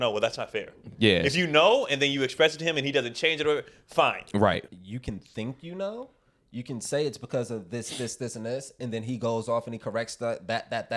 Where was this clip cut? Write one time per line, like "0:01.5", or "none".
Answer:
0:04.6